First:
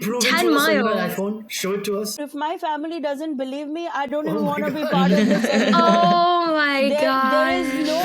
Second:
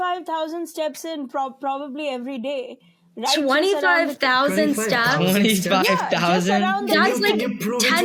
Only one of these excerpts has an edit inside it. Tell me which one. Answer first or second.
first